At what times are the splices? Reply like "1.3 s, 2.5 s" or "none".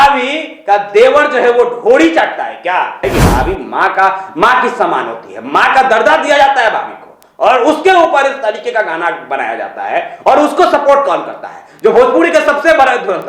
3.0 s